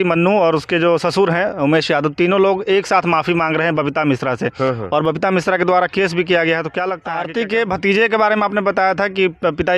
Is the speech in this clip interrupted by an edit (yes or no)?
yes